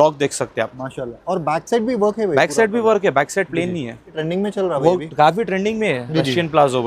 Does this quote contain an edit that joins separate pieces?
yes; 1 cut; at 4.2 s

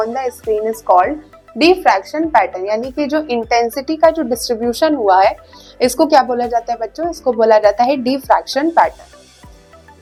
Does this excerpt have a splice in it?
no; 0 cuts

